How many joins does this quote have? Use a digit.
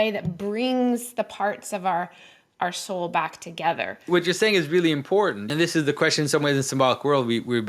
2